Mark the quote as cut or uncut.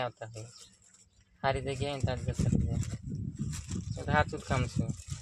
uncut